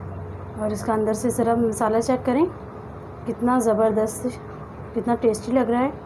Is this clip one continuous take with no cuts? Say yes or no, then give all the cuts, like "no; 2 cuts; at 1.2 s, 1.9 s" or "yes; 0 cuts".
yes; 0 cuts